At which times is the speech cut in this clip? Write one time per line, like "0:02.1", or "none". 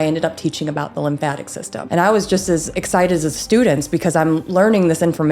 0:01.8
0:02.7